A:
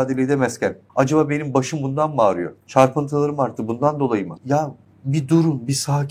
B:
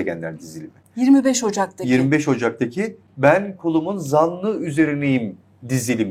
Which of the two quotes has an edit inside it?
A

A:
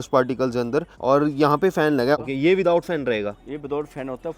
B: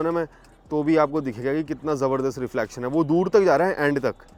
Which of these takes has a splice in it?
A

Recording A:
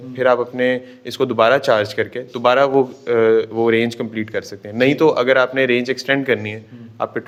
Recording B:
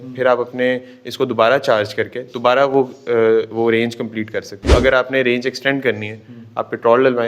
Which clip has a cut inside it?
B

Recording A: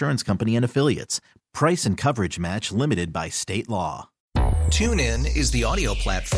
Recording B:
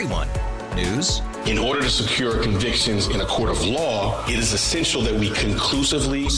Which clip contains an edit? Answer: A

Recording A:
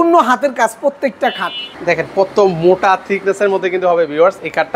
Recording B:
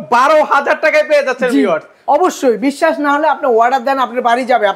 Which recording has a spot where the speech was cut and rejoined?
A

